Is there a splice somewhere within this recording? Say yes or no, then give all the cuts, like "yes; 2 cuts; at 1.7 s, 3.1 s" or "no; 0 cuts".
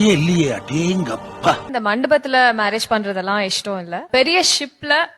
yes; 2 cuts; at 1.7 s, 4.1 s